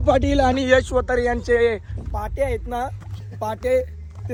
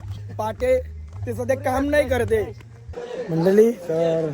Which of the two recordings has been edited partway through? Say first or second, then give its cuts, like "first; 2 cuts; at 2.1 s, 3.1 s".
second; 1 cut; at 3.0 s